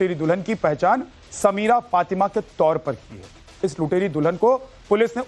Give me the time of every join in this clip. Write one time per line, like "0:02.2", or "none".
0:02.2